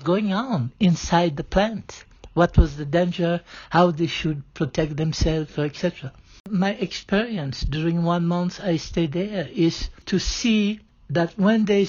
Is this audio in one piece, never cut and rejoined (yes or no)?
no